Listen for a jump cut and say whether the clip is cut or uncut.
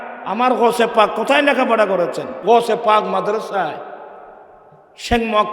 cut